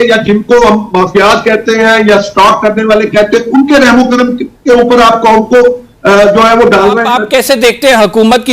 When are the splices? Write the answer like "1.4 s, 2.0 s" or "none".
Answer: 7.1 s